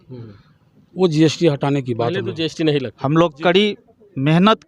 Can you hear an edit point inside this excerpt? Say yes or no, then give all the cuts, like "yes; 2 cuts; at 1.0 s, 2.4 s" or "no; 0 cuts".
yes; 1 cut; at 2.9 s